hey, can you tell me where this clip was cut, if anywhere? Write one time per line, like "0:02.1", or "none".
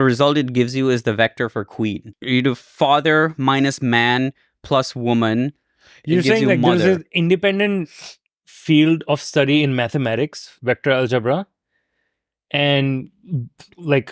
none